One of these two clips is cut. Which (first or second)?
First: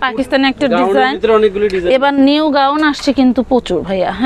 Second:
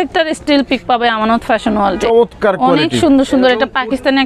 second